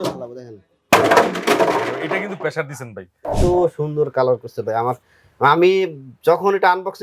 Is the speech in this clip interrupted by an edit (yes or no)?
yes